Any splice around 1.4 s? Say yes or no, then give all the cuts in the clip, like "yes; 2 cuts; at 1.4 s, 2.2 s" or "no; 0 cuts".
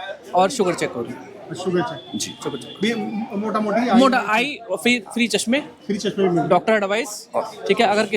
no; 0 cuts